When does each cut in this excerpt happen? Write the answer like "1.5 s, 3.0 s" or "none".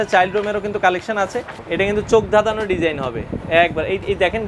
1.6 s